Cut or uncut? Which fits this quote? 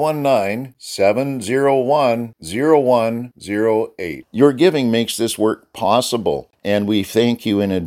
cut